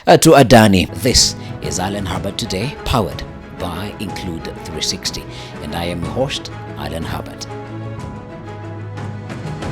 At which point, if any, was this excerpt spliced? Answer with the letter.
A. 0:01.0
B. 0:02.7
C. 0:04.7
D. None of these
A